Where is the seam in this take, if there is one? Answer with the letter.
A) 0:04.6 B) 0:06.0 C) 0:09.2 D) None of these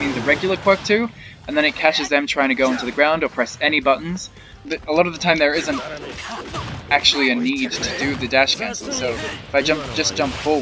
A